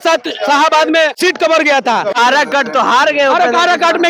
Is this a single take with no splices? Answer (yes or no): no